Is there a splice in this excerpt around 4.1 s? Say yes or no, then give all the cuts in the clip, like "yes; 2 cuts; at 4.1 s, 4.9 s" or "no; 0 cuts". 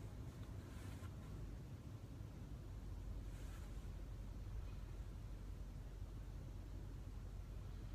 no; 1 cut; at 5.7 s